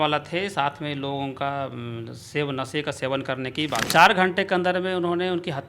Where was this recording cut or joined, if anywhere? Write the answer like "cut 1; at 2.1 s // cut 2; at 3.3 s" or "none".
cut 1; at 3.9 s